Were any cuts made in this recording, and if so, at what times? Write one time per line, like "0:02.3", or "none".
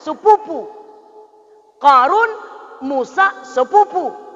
none